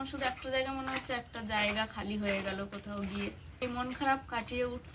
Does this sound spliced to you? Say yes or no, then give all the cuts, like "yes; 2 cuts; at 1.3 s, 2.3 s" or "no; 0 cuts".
yes; 1 cut; at 3.6 s